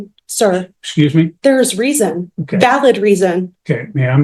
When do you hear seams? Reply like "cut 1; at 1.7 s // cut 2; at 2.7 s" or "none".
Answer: none